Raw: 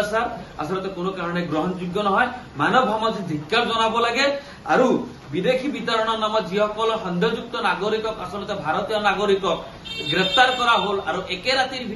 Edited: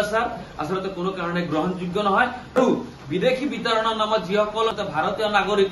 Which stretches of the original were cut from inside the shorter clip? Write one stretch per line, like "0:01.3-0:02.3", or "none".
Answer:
0:02.6-0:04.8
0:07.0-0:08.4